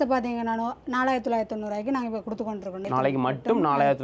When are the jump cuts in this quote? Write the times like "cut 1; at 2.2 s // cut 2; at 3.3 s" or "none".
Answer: cut 1; at 2.8 s